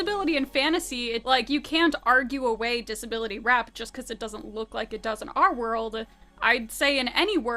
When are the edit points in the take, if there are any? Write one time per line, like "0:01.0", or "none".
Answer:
0:01.2